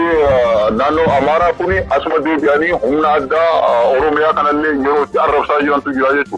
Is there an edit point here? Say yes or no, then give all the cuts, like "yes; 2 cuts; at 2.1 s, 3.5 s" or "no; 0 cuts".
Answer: no; 0 cuts